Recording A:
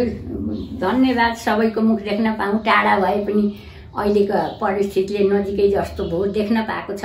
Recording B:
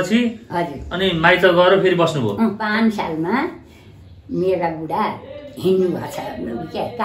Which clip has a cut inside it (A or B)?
B